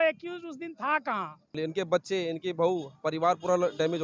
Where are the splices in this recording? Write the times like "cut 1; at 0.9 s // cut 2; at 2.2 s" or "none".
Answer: cut 1; at 1.6 s